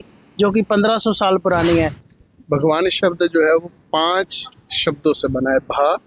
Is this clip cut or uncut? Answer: cut